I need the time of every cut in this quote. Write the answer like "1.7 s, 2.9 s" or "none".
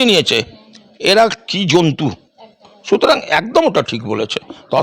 none